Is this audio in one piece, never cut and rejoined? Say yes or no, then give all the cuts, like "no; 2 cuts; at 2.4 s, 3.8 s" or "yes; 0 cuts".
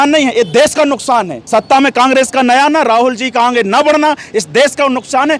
no; 1 cut; at 1.4 s